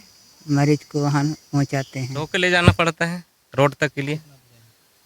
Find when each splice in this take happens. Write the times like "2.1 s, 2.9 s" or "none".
2.3 s